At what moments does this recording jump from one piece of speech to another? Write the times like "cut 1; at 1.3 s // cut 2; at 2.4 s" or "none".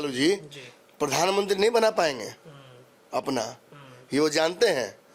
none

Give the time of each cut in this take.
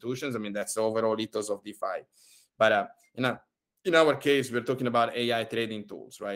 none

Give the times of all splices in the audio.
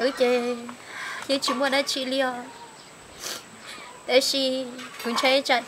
none

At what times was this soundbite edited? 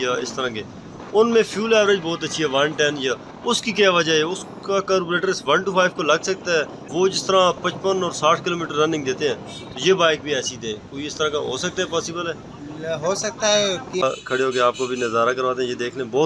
cut 1; at 6.8 s // cut 2; at 14.0 s

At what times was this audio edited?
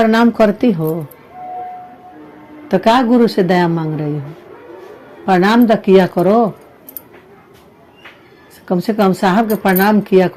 none

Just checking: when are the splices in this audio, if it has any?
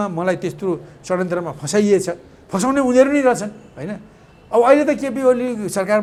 none

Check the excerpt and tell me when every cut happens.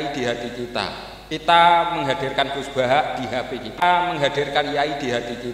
cut 1; at 3.8 s

